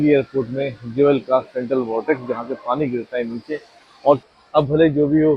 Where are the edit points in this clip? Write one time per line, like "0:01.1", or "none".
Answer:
0:04.2